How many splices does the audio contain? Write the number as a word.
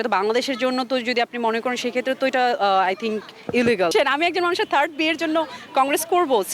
one